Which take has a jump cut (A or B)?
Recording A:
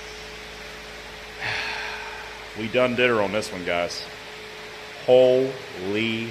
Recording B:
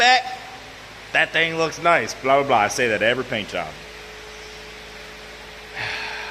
A